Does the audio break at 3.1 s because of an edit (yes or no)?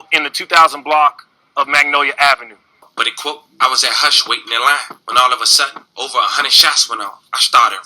yes